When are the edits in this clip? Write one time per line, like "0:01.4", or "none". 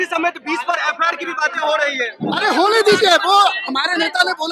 none